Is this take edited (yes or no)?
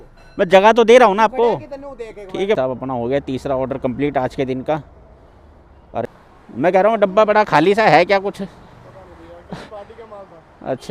yes